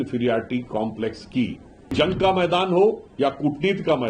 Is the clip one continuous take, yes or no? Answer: no